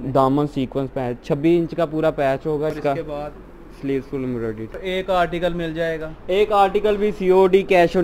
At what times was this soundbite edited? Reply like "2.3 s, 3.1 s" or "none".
2.7 s, 4.8 s